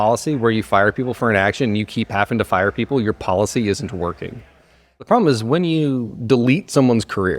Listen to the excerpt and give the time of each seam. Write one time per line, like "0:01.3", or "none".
0:05.0